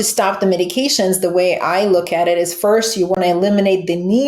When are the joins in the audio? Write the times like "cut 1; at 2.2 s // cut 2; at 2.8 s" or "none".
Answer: none